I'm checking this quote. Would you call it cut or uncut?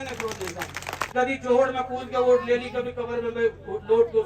cut